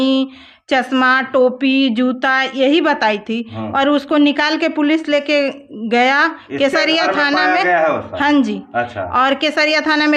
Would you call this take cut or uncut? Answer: uncut